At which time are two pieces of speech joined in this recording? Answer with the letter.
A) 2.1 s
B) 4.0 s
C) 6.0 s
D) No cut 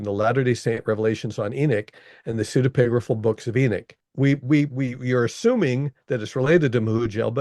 B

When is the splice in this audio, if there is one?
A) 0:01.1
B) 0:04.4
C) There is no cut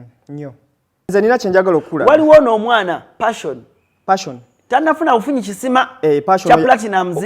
A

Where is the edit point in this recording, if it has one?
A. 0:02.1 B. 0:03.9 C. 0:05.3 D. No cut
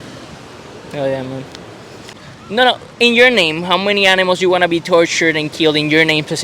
A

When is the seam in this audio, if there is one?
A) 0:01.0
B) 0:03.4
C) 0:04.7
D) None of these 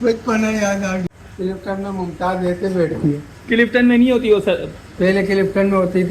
A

